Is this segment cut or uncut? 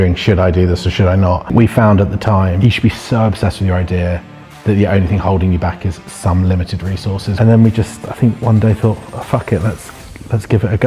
cut